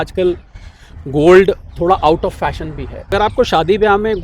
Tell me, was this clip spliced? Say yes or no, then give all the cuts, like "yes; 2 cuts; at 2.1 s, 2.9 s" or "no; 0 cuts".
yes; 1 cut; at 3.1 s